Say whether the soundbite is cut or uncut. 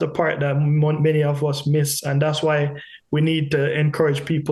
uncut